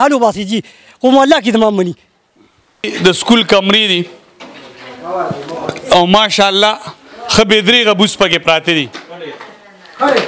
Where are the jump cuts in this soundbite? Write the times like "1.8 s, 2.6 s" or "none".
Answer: 2.9 s